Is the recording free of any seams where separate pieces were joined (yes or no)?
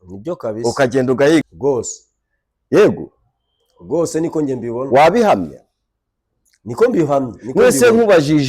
no